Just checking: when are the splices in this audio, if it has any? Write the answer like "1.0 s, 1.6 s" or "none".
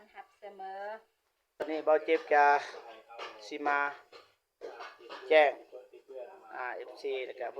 1.6 s